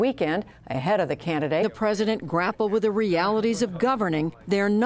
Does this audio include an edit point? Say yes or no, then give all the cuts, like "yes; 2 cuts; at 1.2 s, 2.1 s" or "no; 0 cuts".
no; 0 cuts